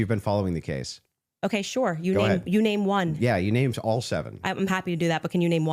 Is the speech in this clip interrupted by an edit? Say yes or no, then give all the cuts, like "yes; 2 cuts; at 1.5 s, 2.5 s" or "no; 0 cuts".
yes; 1 cut; at 4.8 s